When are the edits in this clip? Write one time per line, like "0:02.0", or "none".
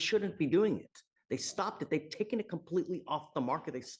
none

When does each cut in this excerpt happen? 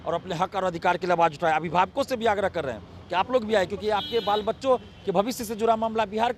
none

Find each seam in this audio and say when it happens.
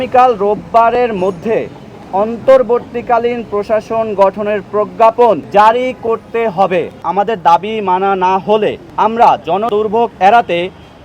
0:05.4
0:07.0
0:08.8
0:09.7

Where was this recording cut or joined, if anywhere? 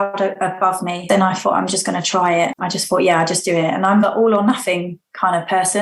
0:01.0
0:02.6

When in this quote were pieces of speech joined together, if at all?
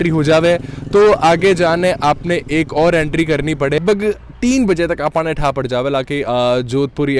0:03.8

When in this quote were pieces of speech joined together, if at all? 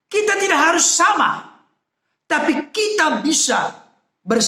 none

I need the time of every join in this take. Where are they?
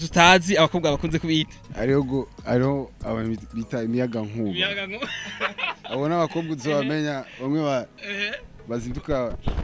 0:01.6

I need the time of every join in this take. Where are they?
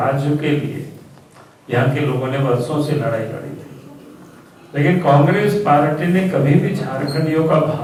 none

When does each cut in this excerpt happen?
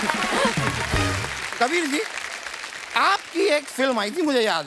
none

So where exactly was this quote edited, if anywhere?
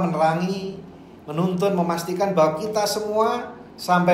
none

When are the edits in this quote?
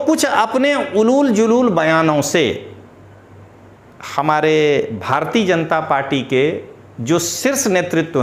none

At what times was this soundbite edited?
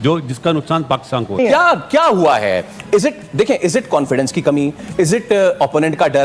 0:01.4

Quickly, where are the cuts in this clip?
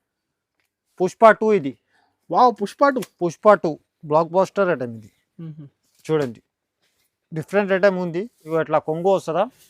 0:08.4

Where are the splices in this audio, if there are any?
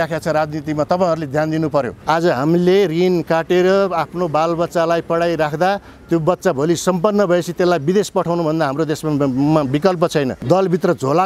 0:01.9
0:10.3

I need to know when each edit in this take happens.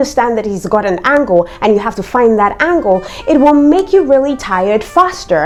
none

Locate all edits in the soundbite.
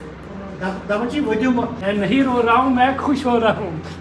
0:01.8

